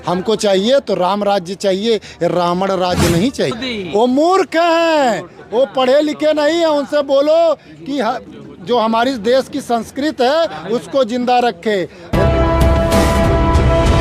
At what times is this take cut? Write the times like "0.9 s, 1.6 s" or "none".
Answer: 3.6 s, 12.2 s